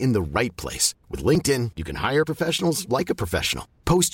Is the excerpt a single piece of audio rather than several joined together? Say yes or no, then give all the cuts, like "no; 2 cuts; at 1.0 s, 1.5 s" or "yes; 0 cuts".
yes; 0 cuts